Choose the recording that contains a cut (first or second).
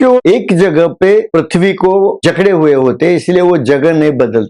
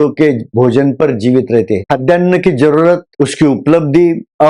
second